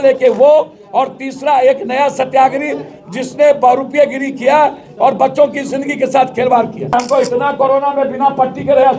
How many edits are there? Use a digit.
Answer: 1